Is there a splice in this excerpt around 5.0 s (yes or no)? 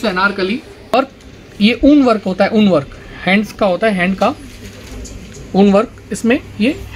no